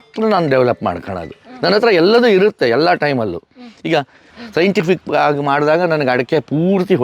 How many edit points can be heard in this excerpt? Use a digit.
1